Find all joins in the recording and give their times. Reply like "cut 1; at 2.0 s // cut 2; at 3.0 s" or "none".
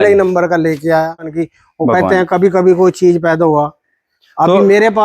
cut 1; at 1.4 s